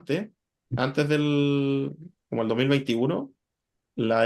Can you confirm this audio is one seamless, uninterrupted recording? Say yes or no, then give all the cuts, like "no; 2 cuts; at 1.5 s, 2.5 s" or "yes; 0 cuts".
yes; 0 cuts